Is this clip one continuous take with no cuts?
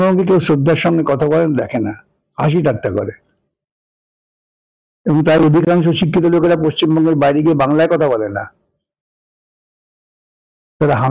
yes; 0 cuts

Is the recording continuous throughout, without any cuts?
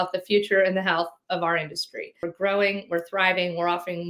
no; 1 cut; at 2.3 s

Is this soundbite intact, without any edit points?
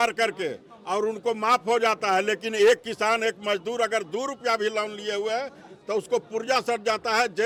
yes; 0 cuts

